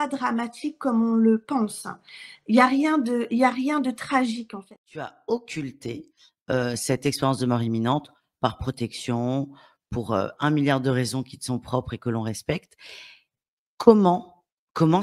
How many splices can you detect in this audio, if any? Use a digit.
1